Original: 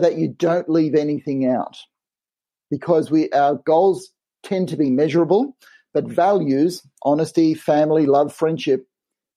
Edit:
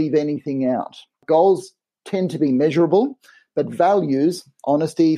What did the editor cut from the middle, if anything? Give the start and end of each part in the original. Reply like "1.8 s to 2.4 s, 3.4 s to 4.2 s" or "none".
2.0 s to 3.6 s